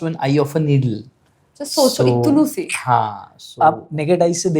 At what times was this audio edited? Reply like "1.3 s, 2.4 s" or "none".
none